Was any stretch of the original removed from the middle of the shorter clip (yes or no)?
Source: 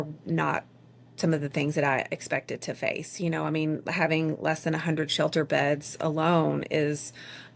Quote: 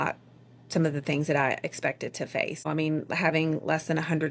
yes